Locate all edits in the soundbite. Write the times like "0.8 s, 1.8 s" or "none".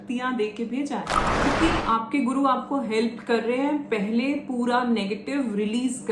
1.5 s